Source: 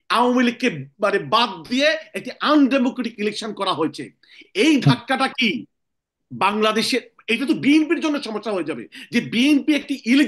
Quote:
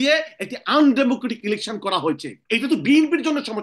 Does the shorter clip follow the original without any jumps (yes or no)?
no